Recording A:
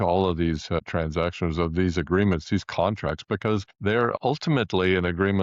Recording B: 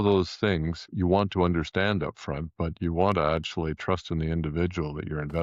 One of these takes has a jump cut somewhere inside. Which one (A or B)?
A